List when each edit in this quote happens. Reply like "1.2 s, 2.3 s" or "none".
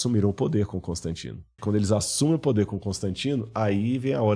1.6 s